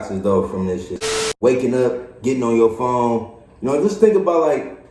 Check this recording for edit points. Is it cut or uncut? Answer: cut